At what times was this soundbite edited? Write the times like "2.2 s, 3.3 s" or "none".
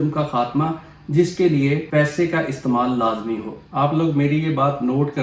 1.8 s, 3.6 s